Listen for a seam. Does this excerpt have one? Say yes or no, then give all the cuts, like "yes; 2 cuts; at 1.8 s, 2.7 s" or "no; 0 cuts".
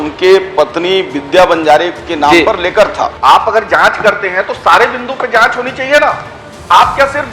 yes; 1 cut; at 3.1 s